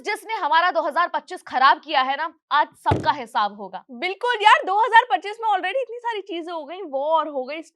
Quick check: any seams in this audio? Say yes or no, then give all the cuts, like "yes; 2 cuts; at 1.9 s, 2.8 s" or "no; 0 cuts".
no; 0 cuts